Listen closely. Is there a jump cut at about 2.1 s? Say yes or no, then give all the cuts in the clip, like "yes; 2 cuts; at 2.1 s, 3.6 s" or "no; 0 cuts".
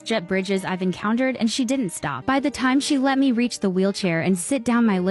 yes; 1 cut; at 2.1 s